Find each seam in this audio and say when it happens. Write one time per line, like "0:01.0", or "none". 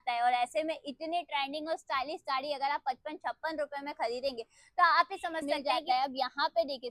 0:05.5